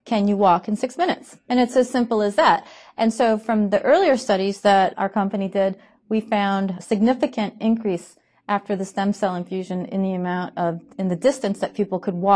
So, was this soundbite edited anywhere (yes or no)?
no